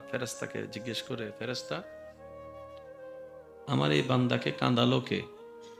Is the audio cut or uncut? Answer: uncut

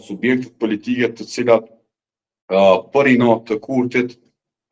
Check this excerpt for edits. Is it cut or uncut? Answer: uncut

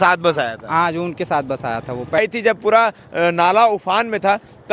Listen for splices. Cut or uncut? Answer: cut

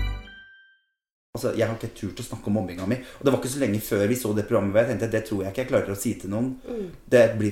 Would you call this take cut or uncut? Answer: cut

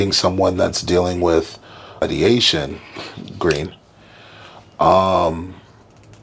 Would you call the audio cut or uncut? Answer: cut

